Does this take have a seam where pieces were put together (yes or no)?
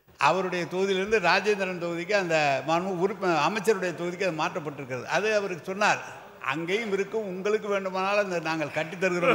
no